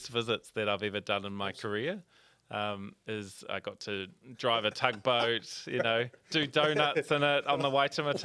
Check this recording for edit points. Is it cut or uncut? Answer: uncut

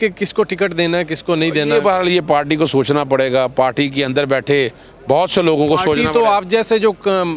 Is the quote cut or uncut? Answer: uncut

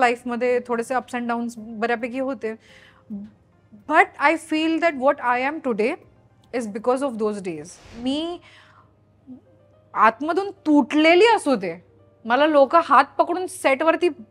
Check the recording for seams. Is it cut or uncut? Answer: cut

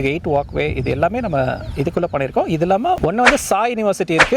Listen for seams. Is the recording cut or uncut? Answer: cut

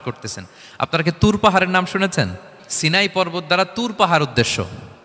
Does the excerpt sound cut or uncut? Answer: cut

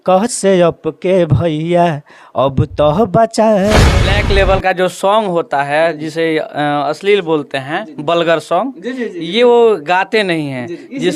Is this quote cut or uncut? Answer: cut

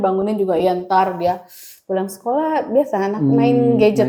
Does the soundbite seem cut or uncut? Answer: uncut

